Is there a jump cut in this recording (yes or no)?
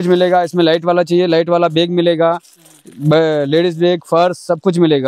no